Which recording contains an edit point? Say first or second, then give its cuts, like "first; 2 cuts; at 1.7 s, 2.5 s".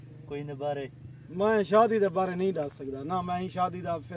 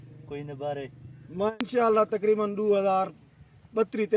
second; 1 cut; at 1.5 s